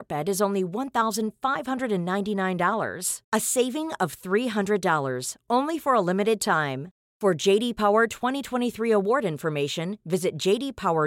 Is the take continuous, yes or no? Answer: yes